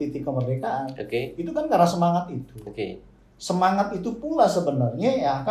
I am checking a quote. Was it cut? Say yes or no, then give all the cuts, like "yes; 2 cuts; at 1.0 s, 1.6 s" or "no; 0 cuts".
no; 0 cuts